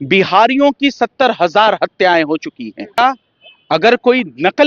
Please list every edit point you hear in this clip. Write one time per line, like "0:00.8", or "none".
0:03.0